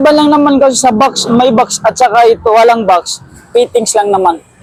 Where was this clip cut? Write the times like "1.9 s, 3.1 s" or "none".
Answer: none